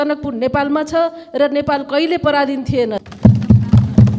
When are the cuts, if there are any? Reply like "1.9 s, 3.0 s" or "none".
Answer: 3.0 s